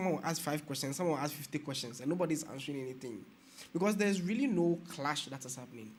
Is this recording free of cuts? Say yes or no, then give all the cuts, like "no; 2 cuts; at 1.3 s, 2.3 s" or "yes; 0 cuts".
yes; 0 cuts